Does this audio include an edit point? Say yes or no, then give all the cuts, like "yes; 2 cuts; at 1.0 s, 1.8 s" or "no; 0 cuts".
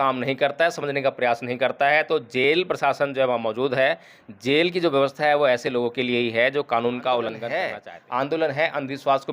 yes; 1 cut; at 7.5 s